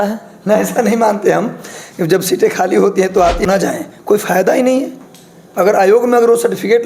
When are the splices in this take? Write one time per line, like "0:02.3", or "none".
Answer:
0:03.4